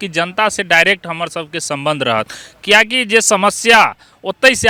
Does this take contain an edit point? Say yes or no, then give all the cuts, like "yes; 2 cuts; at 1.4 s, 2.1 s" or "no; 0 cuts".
no; 0 cuts